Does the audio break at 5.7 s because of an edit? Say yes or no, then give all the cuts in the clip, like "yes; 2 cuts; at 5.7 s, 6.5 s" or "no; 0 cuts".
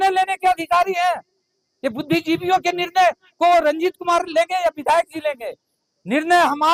no; 0 cuts